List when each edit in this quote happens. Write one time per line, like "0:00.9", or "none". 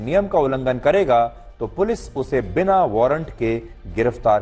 none